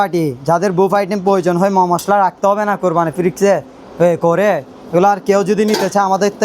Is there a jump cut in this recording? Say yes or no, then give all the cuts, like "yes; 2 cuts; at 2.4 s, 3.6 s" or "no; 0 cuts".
no; 0 cuts